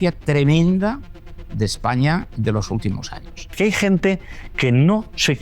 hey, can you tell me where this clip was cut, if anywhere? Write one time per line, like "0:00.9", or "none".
0:03.5